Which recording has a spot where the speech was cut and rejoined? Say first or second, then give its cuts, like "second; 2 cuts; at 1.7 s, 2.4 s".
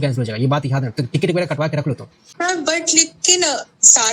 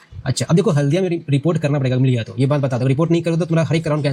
first; 1 cut; at 2.2 s